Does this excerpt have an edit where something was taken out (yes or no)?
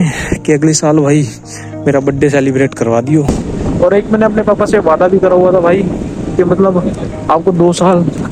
yes